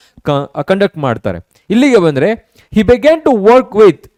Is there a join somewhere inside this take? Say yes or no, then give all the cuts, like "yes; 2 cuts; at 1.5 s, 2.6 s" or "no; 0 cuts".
no; 0 cuts